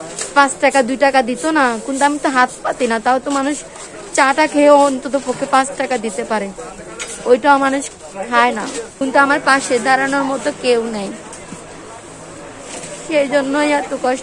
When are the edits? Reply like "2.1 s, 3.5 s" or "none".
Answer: 8.9 s

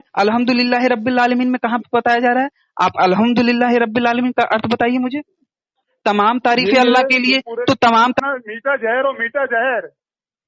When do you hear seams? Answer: 8.2 s

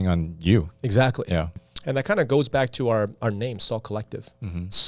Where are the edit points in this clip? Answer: 1.6 s

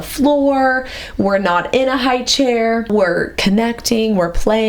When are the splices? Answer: 2.9 s

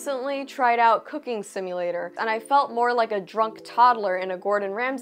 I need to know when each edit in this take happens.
2.1 s

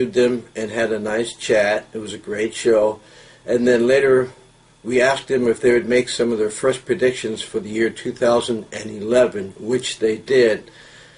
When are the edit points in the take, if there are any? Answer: 2.7 s

